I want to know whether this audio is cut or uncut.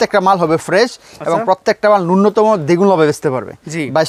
uncut